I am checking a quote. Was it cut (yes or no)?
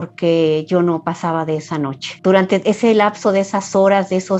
yes